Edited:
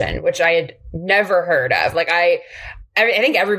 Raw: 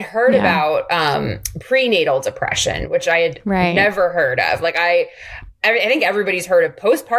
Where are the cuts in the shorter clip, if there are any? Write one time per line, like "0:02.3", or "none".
none